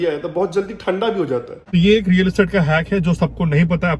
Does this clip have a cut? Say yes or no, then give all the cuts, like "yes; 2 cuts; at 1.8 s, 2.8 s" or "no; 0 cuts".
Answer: yes; 1 cut; at 1.6 s